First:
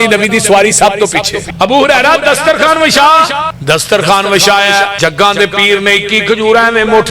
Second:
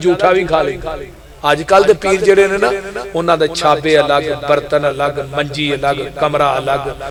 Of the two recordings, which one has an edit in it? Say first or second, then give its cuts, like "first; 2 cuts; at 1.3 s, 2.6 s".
first; 3 cuts; at 1.4 s, 3.5 s, 4.9 s